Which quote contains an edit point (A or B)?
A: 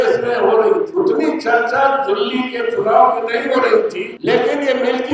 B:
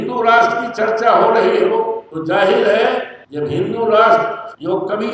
A